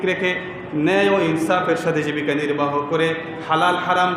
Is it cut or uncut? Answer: uncut